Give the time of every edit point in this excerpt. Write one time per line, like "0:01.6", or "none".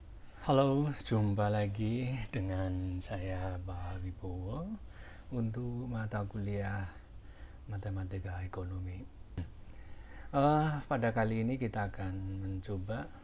0:09.4